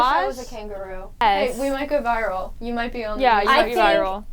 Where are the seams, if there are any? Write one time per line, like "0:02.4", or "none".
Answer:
0:01.2